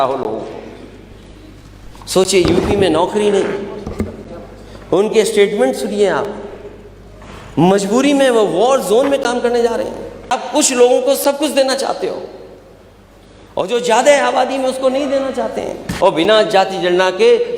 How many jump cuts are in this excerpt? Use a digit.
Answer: 2